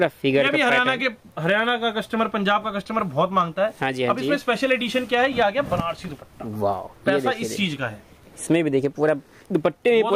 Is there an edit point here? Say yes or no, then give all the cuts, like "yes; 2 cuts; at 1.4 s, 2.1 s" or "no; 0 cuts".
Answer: no; 0 cuts